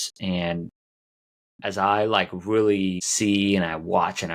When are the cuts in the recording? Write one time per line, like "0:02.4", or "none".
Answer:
0:03.1